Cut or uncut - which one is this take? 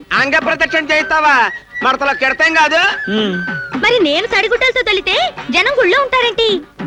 uncut